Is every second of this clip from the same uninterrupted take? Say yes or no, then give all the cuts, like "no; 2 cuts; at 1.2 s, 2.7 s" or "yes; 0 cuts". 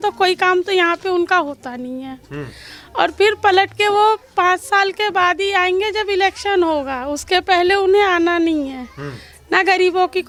yes; 0 cuts